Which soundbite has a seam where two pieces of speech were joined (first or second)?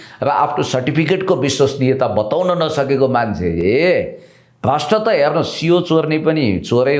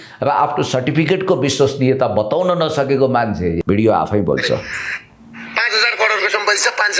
second